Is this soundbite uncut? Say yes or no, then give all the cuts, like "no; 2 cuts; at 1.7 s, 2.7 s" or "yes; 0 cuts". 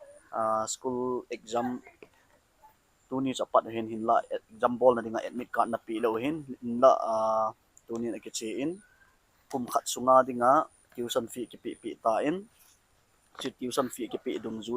yes; 0 cuts